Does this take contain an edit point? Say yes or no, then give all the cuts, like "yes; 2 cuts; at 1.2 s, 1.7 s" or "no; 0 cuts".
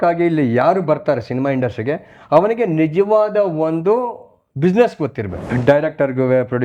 yes; 1 cut; at 5.4 s